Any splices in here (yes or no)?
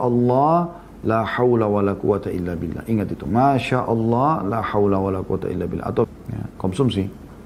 yes